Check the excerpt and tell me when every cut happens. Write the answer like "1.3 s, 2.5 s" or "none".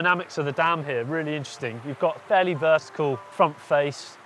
3.2 s